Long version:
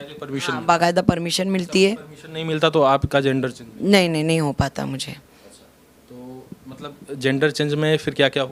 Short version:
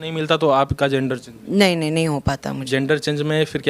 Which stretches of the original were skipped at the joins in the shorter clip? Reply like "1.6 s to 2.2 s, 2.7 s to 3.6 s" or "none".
4.9 s to 7.1 s